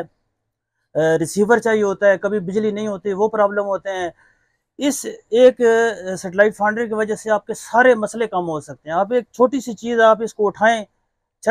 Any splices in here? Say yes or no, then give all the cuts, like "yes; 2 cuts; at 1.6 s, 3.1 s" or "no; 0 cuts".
no; 0 cuts